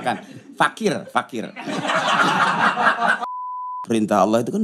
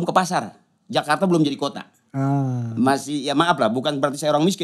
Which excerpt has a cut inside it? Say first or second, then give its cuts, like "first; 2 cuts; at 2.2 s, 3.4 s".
first; 1 cut; at 3.6 s